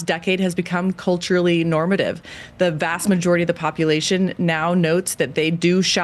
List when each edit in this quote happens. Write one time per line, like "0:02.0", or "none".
none